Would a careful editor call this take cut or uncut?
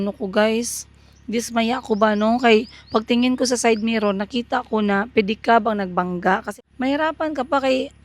cut